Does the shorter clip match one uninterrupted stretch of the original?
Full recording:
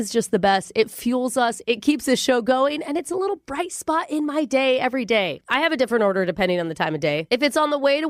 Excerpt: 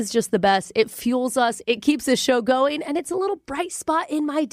yes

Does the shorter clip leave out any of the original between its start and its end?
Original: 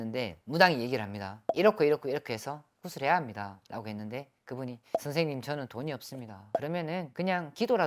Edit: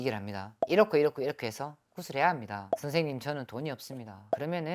yes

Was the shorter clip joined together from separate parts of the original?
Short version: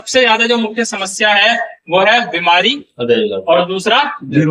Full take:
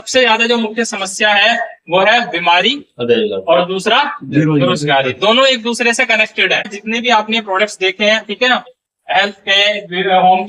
no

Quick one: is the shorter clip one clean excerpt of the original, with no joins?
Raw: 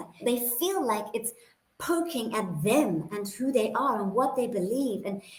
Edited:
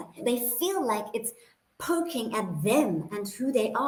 yes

